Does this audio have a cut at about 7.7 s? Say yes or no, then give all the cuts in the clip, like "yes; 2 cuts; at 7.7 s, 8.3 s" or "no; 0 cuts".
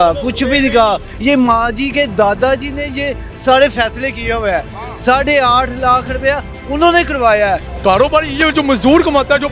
yes; 2 cuts; at 1.1 s, 7.7 s